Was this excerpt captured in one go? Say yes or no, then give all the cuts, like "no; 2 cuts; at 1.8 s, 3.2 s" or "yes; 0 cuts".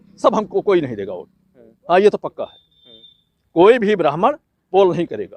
yes; 0 cuts